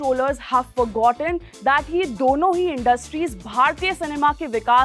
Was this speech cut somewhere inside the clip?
no; 0 cuts

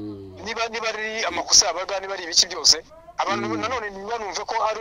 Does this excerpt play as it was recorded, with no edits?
yes; 0 cuts

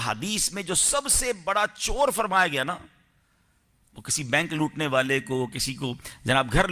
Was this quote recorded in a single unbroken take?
yes; 0 cuts

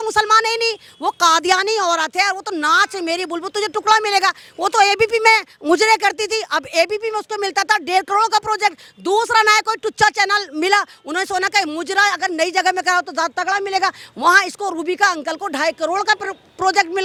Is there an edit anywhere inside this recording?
no; 0 cuts

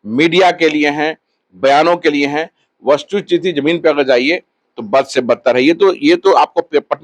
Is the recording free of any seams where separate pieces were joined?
yes; 0 cuts

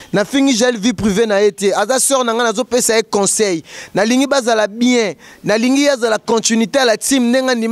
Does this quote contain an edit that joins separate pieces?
no; 0 cuts

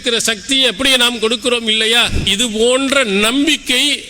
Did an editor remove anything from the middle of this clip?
yes; 1 cut; at 2.2 s

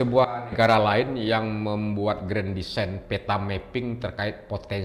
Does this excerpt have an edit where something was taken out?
no; 0 cuts

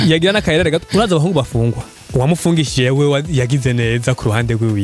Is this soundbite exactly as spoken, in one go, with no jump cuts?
no; 1 cut; at 1.8 s

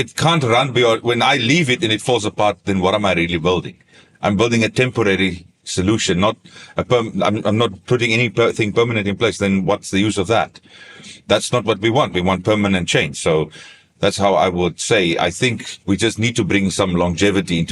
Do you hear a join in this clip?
no; 0 cuts

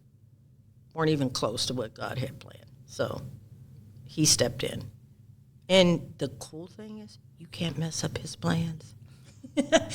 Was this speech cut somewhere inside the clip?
no; 0 cuts

